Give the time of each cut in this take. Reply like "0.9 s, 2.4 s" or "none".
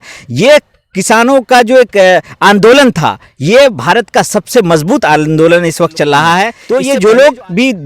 6.6 s

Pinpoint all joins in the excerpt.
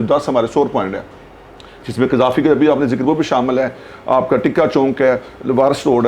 none

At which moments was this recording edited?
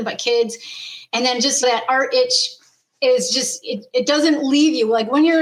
none

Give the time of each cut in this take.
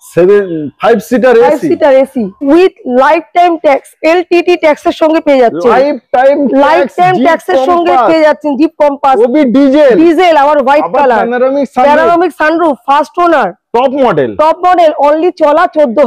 2.4 s

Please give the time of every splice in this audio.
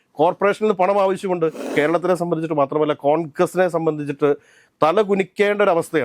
1.6 s

